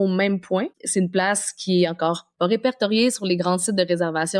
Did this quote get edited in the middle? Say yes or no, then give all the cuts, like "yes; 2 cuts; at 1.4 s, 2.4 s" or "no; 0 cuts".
no; 0 cuts